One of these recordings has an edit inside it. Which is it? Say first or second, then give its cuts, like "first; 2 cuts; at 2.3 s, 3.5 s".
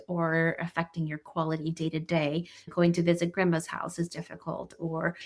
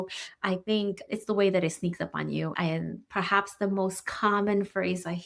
second; 1 cut; at 2.5 s